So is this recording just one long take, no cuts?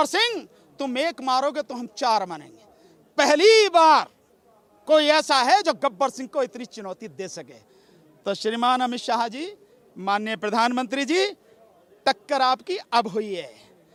yes; 0 cuts

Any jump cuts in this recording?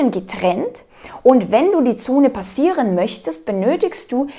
no; 0 cuts

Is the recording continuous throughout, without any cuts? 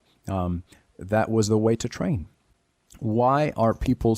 yes; 0 cuts

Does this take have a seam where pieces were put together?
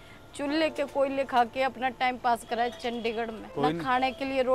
yes; 1 cut; at 3.4 s

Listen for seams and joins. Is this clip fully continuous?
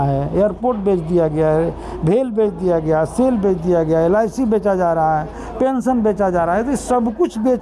yes; 0 cuts

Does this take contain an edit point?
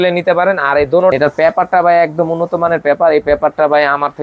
yes; 1 cut; at 1.1 s

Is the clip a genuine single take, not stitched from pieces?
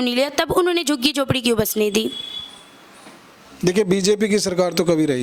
yes; 0 cuts

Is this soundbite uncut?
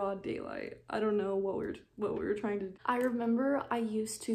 no; 1 cut; at 2.7 s

